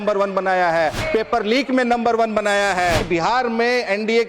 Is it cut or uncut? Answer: cut